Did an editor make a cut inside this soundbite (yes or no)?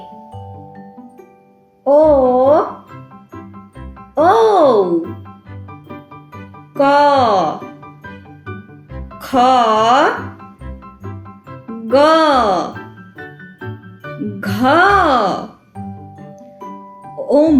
yes